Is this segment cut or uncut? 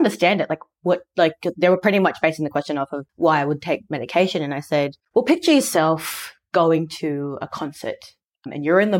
cut